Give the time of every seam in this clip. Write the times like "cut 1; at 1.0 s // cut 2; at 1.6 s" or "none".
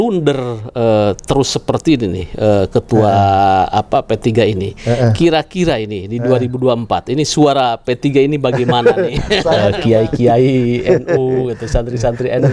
cut 1; at 9.7 s